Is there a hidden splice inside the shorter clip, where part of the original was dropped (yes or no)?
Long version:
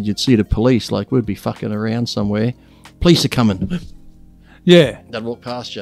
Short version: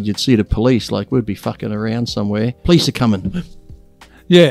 yes